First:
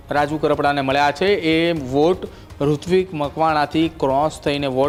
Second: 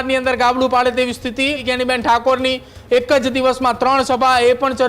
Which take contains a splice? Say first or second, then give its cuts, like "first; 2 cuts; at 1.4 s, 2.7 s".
second; 1 cut; at 1.7 s